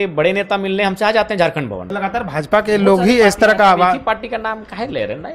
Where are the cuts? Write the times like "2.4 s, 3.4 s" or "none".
1.8 s